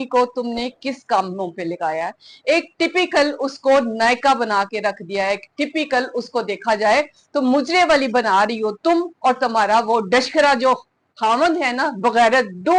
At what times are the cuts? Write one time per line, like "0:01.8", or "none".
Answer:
none